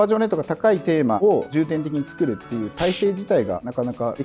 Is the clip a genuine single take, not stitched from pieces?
yes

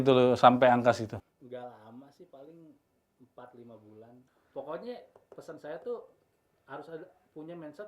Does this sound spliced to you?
yes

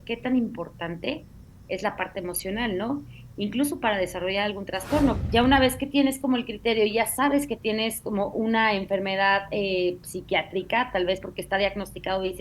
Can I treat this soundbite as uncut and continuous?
no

